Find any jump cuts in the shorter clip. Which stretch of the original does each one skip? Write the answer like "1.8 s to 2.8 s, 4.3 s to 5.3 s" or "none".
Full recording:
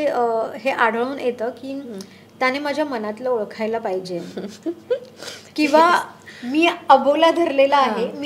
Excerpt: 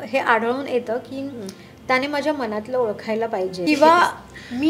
4.1 s to 5.5 s